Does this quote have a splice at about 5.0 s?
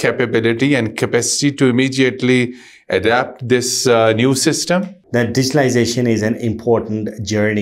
yes; 1 cut; at 5.0 s

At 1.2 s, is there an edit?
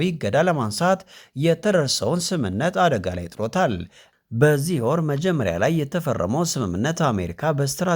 no; 1 cut; at 4.1 s

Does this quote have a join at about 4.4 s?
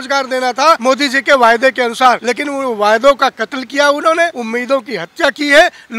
yes; 3 cuts; at 0.8 s, 2.3 s, 4.4 s

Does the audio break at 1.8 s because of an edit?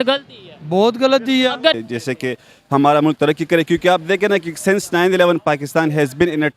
yes; 1 cut; at 1.8 s

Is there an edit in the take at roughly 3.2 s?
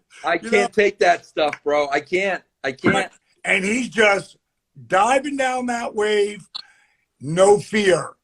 yes; 1 cut; at 3.2 s

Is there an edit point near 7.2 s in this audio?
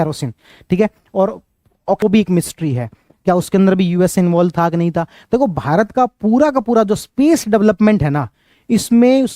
no; 1 cut; at 2.0 s

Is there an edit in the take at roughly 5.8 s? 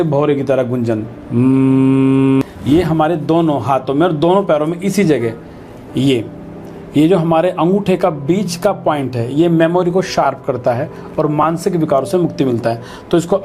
no; 1 cut; at 2.4 s

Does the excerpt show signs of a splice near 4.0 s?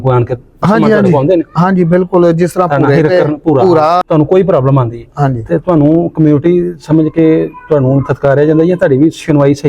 yes; 1 cut; at 4.0 s

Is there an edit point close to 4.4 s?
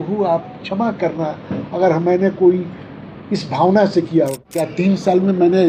yes; 1 cut; at 4.4 s

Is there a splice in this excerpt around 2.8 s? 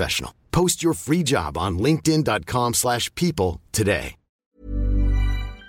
no; 1 cut; at 4.4 s

